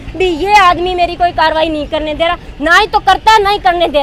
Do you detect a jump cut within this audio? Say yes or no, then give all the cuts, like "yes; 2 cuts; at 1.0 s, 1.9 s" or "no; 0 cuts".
no; 0 cuts